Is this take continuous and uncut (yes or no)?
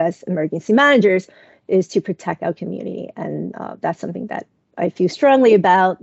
yes